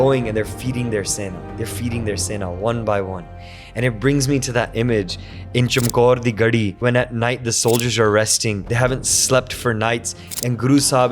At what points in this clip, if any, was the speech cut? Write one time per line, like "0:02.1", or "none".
0:01.4
0:06.7
0:08.6